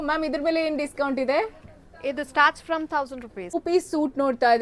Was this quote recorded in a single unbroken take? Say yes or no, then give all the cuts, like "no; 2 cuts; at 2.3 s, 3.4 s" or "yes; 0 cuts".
no; 1 cut; at 3.4 s